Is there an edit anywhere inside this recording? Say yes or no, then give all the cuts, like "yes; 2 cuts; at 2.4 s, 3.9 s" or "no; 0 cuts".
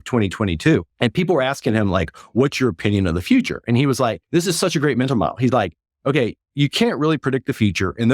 yes; 2 cuts; at 0.9 s, 4.2 s